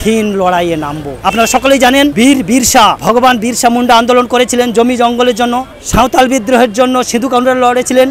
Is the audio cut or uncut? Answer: uncut